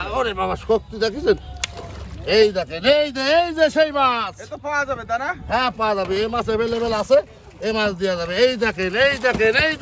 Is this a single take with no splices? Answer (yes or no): yes